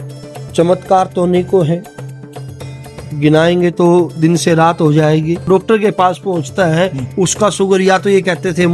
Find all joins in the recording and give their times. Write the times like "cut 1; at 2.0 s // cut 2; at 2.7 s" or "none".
cut 1; at 5.5 s